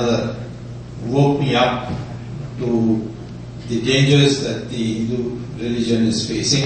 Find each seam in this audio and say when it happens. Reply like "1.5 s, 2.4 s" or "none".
none